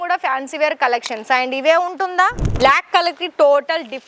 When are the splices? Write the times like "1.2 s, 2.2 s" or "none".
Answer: 2.4 s